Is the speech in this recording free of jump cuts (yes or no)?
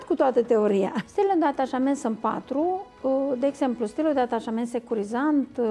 no